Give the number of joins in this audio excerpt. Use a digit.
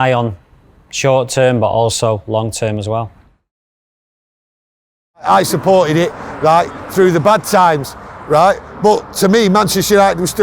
0